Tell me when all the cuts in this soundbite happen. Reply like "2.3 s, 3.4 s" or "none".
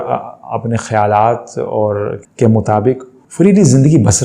2.2 s, 3.2 s